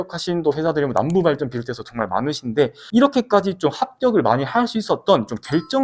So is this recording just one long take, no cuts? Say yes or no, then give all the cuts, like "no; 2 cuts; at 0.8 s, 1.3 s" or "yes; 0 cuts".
no; 1 cut; at 2.8 s